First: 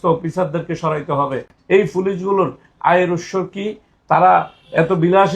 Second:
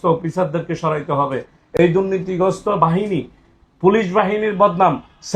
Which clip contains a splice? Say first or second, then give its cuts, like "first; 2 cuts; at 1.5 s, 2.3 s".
first; 1 cut; at 1.5 s